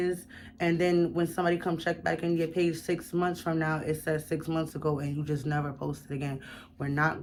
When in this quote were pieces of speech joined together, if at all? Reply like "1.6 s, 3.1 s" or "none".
none